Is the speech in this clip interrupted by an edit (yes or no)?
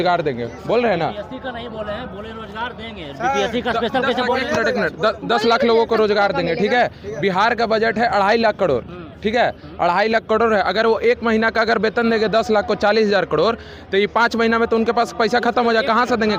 no